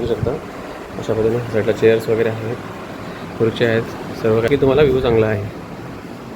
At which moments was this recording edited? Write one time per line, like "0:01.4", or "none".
0:04.5